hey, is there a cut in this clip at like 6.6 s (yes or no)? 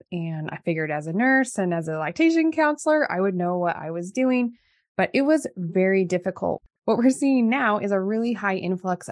yes